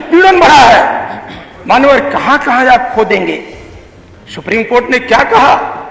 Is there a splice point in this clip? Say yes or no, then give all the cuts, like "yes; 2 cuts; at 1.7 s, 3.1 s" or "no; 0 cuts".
no; 0 cuts